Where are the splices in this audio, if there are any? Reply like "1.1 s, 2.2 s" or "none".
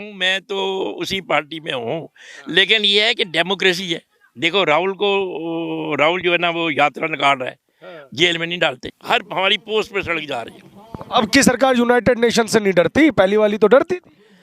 8.9 s